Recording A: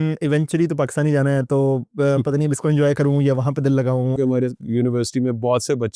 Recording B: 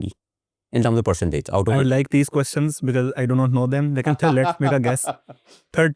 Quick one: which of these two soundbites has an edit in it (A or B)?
A